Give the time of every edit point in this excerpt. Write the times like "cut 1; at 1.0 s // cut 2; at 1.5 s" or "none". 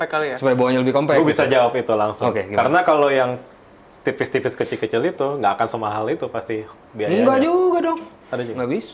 none